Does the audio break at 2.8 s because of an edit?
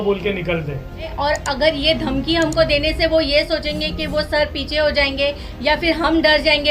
no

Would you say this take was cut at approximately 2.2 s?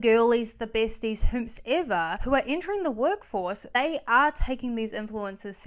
yes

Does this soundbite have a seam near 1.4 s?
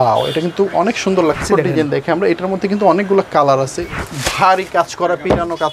yes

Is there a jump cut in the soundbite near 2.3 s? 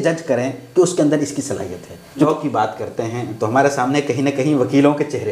yes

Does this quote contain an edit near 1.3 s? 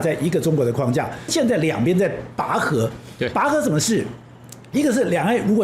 yes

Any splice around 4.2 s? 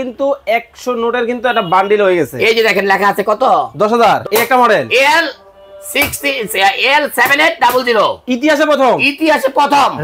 yes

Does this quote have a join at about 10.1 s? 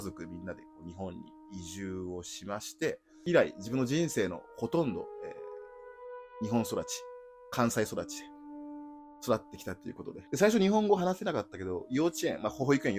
yes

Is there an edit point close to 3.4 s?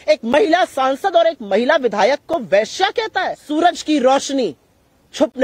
yes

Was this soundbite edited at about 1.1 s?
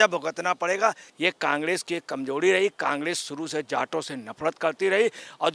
yes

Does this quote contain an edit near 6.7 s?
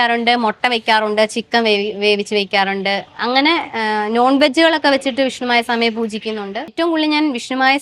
yes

